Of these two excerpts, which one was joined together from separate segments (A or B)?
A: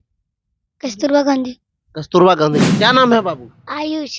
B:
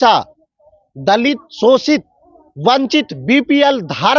A